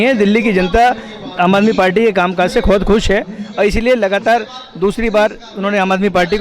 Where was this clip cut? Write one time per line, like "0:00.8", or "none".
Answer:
none